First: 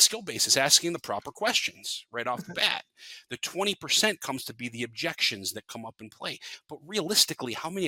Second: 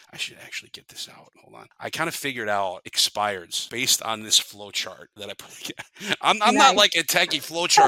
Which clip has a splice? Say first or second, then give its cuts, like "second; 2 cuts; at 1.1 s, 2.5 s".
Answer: second; 4 cuts; at 1.4 s, 2.9 s, 3.6 s, 5.1 s